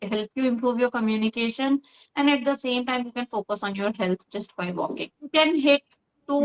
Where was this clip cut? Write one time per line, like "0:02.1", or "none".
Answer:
0:05.3